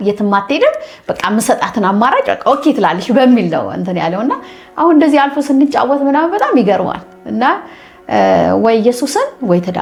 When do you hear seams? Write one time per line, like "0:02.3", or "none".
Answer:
none